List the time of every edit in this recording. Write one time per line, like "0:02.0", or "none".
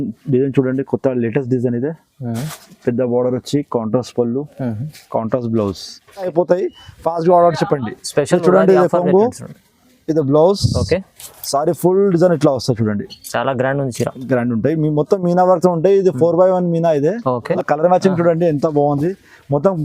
0:06.3
0:17.6